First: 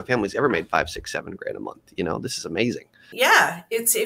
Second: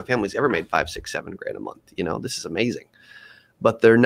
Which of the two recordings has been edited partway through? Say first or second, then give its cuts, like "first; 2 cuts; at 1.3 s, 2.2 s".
first; 1 cut; at 3.1 s